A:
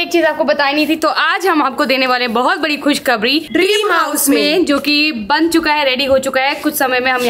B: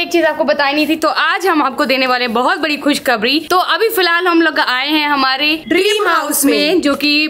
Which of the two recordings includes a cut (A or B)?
A